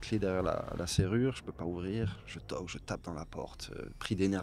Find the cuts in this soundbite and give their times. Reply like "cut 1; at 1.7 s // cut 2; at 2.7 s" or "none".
none